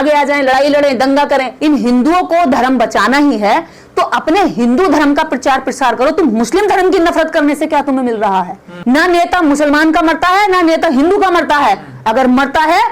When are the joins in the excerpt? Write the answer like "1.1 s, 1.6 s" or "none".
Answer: 1.5 s, 8.7 s